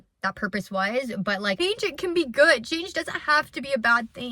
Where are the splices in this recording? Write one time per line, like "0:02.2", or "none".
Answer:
0:01.6